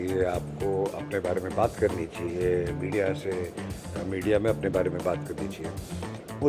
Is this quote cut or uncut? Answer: uncut